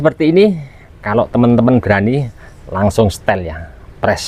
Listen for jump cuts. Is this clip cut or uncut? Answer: uncut